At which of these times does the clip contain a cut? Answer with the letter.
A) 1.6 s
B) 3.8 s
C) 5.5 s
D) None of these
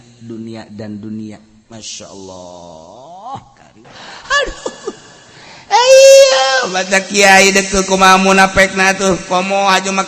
B